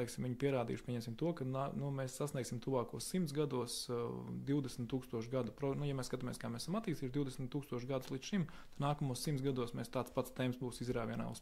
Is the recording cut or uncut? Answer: uncut